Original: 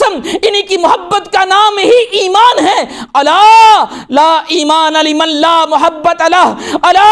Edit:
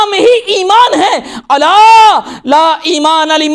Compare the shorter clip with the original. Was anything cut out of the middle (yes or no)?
no